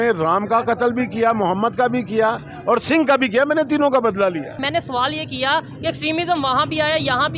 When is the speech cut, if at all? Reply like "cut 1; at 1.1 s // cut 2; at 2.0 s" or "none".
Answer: cut 1; at 4.6 s